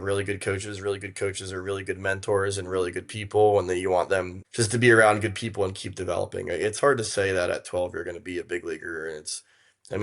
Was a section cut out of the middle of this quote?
yes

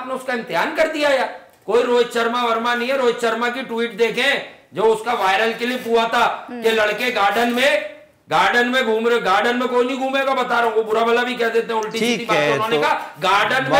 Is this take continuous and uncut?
yes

